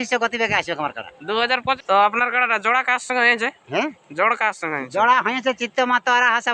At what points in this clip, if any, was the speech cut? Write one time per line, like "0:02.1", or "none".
0:01.8